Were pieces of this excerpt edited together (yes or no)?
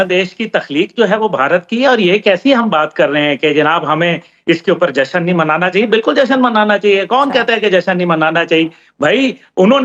no